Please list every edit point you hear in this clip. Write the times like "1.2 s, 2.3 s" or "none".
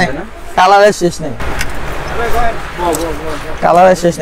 none